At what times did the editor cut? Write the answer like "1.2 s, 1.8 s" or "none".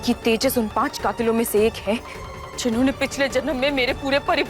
none